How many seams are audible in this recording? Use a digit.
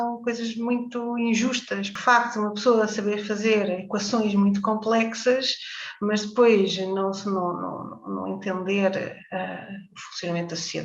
1